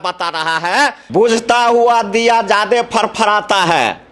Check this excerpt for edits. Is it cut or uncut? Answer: cut